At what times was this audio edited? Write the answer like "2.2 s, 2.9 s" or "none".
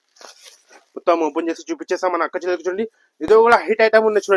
none